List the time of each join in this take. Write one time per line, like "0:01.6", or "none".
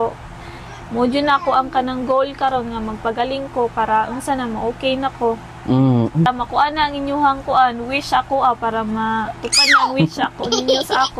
0:06.3